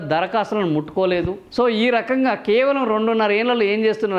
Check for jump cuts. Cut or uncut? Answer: cut